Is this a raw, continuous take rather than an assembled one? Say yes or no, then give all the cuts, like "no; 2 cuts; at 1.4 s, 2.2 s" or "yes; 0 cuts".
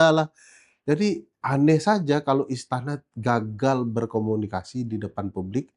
yes; 0 cuts